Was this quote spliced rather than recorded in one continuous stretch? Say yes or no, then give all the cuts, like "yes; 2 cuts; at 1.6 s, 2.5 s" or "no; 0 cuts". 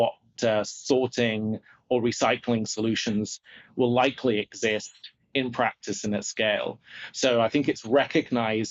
no; 0 cuts